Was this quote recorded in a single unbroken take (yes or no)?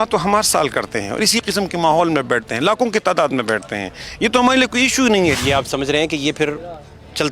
no